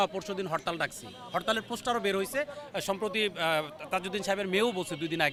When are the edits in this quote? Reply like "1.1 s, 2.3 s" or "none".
none